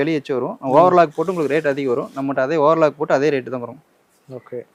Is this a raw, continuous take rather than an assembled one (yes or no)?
yes